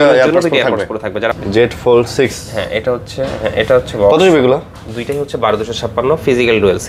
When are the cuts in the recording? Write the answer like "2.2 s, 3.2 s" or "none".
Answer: 1.4 s